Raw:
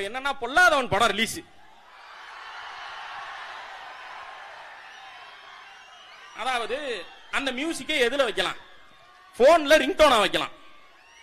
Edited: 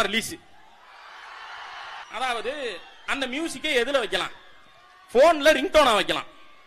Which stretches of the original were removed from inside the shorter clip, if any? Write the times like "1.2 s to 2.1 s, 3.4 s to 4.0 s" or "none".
3.1 s to 6.3 s